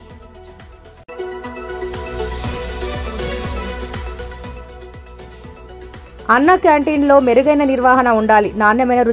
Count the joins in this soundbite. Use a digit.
0